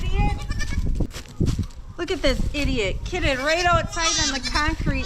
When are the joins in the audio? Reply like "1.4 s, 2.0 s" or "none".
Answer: 1.2 s